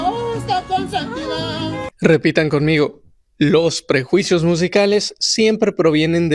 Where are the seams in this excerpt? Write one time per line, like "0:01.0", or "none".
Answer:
none